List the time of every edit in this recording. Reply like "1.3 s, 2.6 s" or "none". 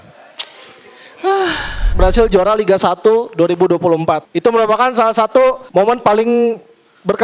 1.9 s, 4.3 s, 5.6 s